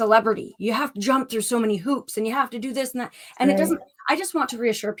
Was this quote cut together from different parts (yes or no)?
no